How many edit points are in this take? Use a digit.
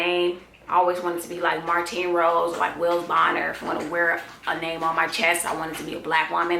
0